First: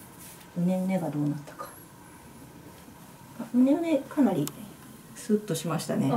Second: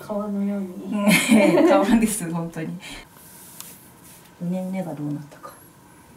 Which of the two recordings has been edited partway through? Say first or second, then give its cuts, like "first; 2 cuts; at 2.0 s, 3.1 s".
second; 1 cut; at 2.9 s